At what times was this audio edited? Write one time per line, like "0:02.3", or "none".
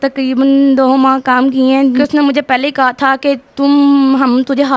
0:02.0